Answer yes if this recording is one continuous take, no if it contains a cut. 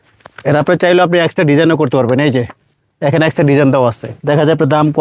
no